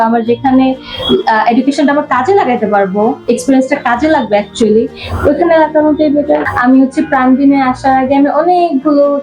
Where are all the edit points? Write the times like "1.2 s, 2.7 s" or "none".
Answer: 6.4 s